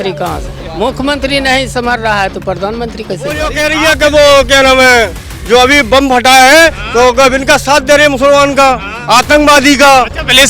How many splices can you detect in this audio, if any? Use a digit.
1